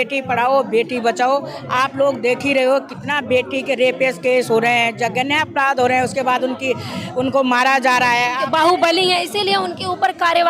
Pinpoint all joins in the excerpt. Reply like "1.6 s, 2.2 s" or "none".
8.4 s